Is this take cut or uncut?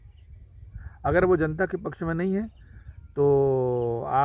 uncut